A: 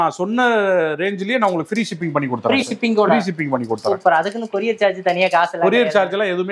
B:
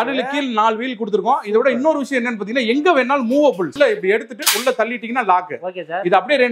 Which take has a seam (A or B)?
B